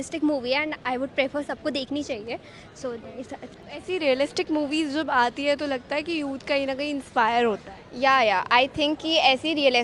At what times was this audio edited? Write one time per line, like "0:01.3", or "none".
none